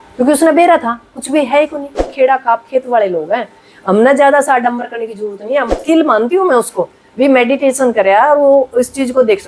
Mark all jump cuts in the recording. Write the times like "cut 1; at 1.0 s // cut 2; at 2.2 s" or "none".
cut 1; at 2.0 s // cut 2; at 5.7 s